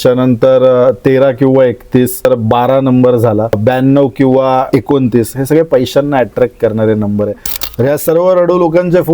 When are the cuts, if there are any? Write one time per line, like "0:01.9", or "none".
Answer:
0:02.2
0:03.6
0:04.7
0:07.5